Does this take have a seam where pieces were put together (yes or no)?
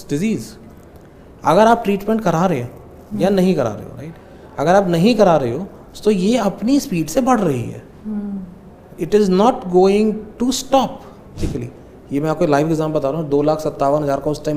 yes